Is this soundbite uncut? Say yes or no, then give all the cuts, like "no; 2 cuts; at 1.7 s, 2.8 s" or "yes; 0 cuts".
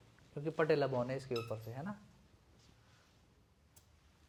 yes; 0 cuts